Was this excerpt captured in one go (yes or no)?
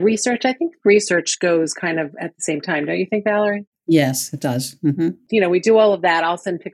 yes